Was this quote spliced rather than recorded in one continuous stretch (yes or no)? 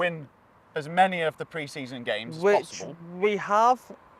no